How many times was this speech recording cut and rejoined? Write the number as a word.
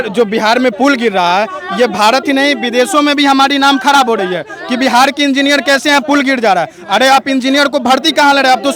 zero